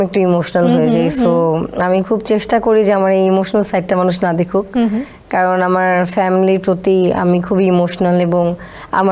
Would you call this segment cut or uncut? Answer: uncut